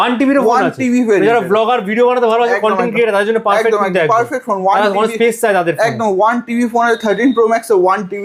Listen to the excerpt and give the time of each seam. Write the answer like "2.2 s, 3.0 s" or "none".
none